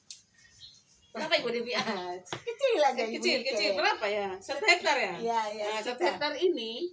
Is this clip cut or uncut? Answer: uncut